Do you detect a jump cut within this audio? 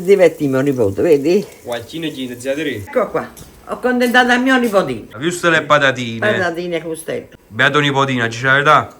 yes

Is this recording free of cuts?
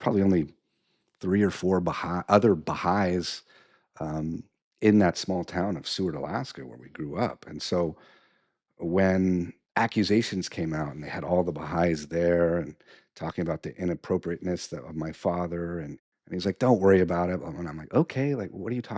no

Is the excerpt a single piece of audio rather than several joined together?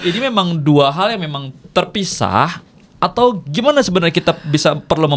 yes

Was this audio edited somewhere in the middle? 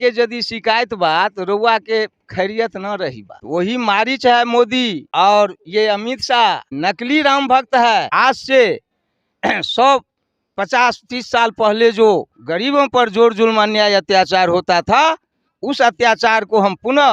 yes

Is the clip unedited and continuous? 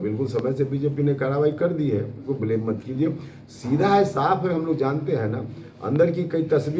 no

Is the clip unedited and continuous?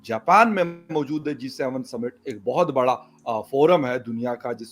yes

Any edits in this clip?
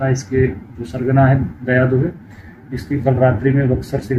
no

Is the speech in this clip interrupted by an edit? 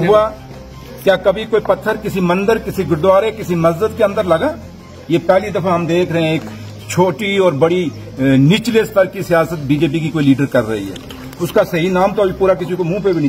no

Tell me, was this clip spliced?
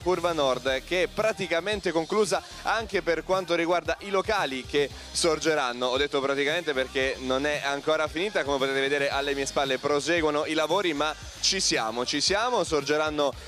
no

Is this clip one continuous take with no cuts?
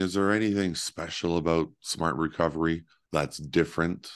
no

